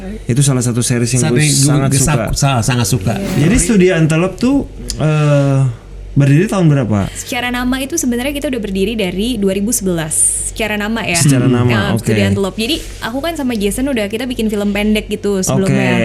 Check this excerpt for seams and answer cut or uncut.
cut